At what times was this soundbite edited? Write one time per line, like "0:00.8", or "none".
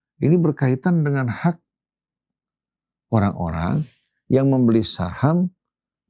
none